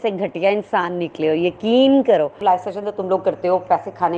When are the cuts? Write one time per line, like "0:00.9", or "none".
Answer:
0:02.4